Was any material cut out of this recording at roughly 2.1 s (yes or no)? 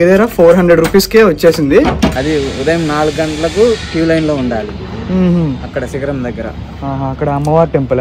yes